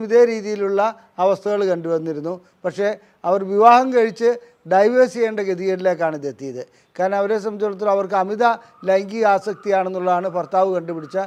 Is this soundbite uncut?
yes; 0 cuts

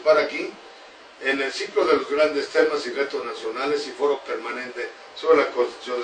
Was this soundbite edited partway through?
no; 0 cuts

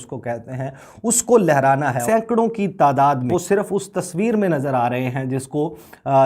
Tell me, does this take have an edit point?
yes; 2 cuts; at 2.0 s, 3.3 s

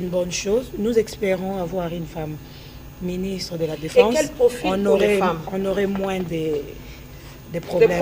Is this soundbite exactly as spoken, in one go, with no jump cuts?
yes; 0 cuts

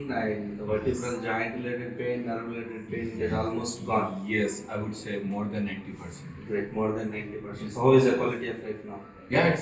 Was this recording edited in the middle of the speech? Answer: no; 0 cuts

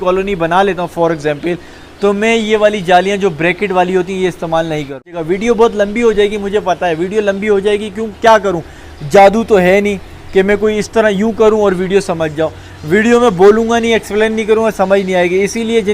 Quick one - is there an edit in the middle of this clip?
yes; 1 cut; at 5.1 s

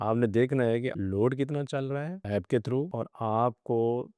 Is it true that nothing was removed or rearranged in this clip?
no; 3 cuts; at 1.0 s, 2.2 s, 2.9 s

